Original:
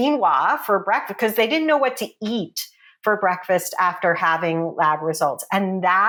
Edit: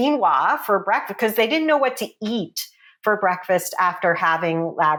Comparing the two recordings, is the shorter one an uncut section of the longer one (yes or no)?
yes